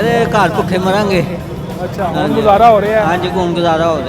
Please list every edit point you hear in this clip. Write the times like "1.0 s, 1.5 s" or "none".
none